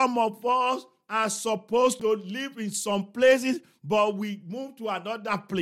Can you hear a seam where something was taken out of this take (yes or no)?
yes